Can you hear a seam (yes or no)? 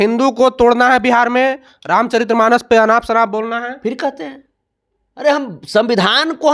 no